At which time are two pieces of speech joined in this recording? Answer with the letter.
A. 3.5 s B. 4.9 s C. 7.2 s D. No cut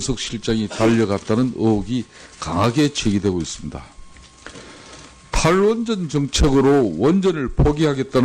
C